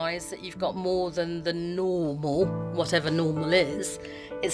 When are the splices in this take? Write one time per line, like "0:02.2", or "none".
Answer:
none